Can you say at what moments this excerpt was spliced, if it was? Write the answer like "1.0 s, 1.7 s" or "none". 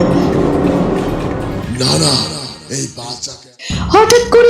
3.1 s

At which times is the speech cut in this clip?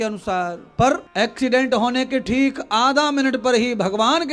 1.1 s

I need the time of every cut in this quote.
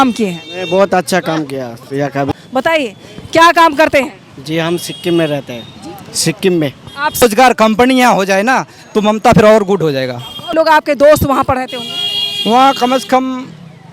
2.3 s, 7.2 s, 10.5 s

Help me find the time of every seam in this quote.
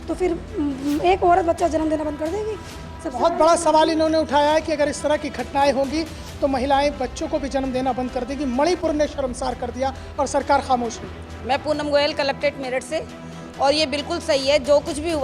none

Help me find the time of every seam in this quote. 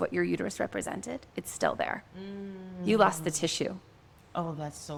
none

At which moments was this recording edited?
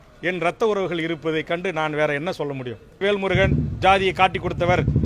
3.0 s

